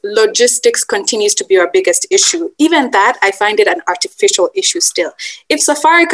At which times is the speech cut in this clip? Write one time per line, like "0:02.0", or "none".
none